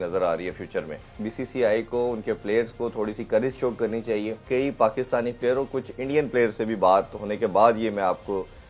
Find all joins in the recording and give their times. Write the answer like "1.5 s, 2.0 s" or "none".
1.1 s, 4.4 s